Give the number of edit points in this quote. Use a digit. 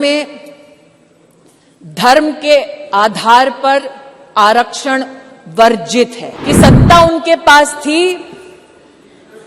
1